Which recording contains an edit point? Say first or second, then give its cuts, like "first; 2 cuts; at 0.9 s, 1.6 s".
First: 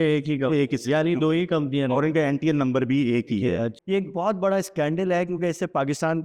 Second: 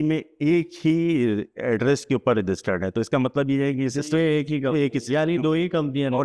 first; 1 cut; at 3.7 s